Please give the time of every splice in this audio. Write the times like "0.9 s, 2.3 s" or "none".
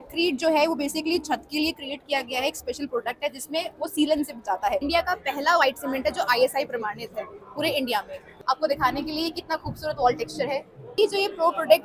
4.8 s, 8.2 s, 11.0 s